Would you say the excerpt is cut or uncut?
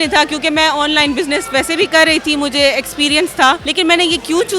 cut